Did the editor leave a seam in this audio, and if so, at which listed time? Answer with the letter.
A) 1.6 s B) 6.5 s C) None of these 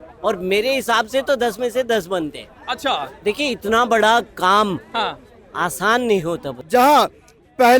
B